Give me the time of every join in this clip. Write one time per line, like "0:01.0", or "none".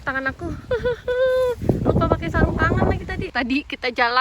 0:03.3